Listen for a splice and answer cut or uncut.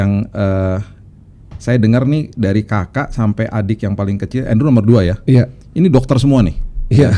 uncut